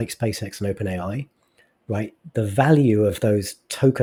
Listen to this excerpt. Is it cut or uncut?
uncut